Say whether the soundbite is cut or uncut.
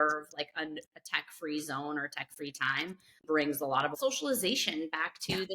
cut